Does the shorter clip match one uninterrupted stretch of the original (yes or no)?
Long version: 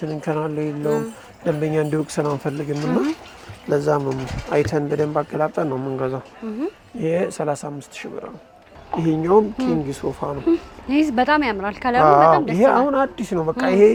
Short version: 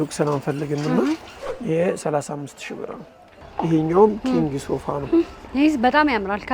no